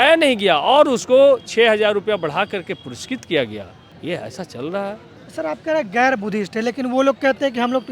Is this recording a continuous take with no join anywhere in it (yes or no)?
yes